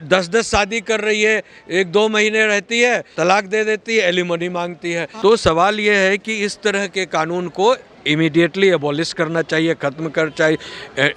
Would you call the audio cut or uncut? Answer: cut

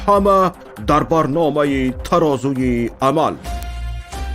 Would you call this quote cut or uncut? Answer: cut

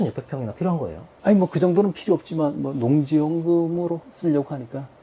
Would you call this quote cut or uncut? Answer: cut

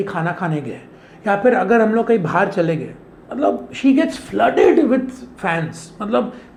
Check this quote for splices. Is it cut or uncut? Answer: uncut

